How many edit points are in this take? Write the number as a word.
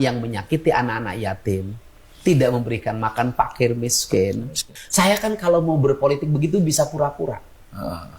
one